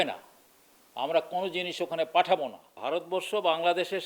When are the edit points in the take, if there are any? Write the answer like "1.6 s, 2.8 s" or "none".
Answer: 2.7 s